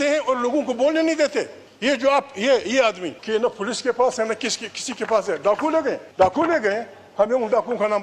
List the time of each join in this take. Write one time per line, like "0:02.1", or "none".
0:01.6
0:03.1
0:06.1